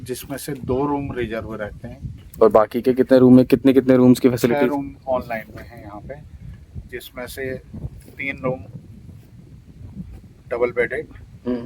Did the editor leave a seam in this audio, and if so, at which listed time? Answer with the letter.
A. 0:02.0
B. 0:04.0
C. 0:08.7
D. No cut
A